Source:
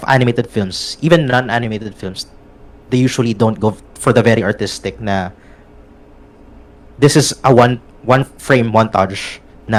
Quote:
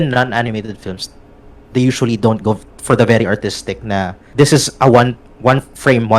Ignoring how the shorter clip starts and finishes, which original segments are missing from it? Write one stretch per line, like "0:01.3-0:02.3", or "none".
0:05.4-0:06.8